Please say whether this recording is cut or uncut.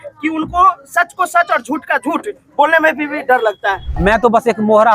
cut